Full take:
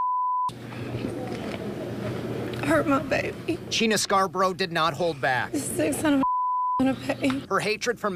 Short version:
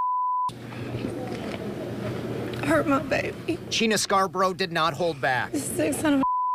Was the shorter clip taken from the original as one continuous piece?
yes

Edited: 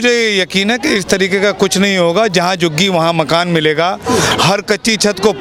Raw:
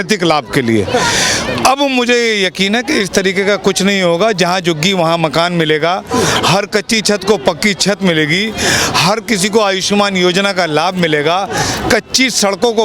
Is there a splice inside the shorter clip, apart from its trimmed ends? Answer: no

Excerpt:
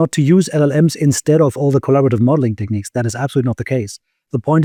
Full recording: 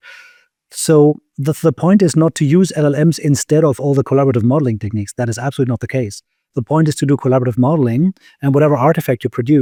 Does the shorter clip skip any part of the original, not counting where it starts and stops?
no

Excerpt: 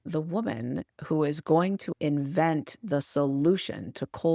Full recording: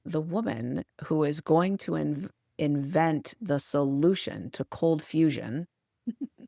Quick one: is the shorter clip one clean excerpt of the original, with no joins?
no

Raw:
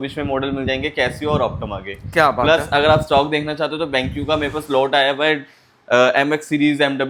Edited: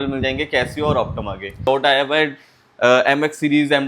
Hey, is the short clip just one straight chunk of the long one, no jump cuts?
no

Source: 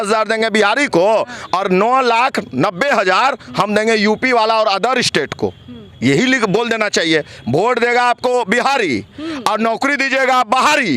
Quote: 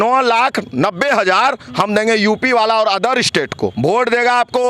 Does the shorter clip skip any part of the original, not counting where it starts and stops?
yes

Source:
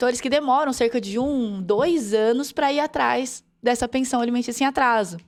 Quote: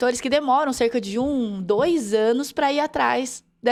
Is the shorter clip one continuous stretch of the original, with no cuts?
yes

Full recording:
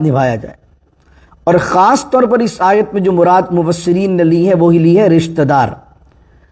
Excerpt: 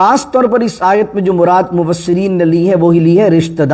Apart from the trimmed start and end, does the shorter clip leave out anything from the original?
no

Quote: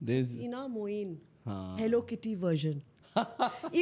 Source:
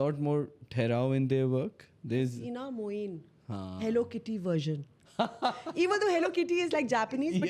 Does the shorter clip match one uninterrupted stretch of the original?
yes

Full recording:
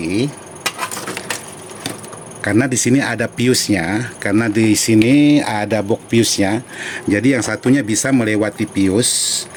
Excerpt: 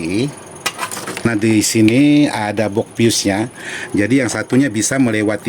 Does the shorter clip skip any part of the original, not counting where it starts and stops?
yes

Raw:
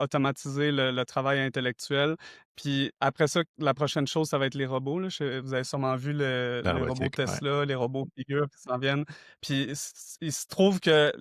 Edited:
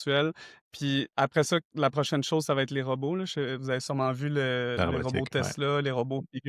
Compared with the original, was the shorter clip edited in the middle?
no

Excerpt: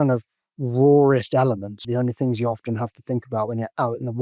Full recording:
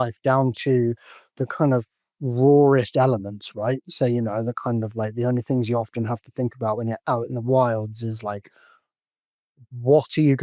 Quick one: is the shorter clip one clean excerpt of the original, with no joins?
no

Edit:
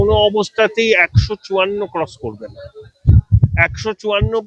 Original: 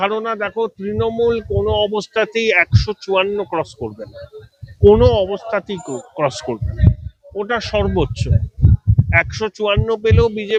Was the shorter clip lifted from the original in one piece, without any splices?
no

